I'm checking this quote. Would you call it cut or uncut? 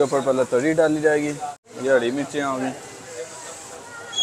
cut